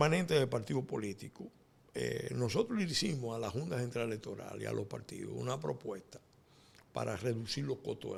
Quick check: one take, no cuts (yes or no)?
yes